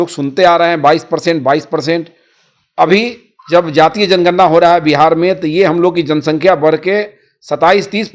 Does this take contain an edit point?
no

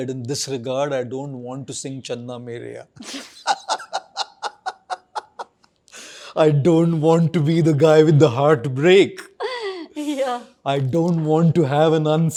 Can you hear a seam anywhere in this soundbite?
no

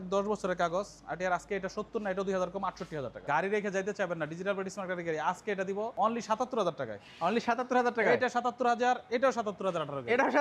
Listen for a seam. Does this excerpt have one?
yes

